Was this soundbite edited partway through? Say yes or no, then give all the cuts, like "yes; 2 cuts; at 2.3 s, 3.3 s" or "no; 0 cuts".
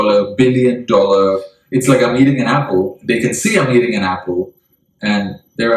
yes; 1 cut; at 1.5 s